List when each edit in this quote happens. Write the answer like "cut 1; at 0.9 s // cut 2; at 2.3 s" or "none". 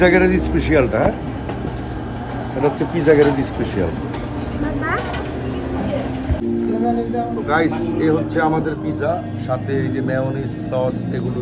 none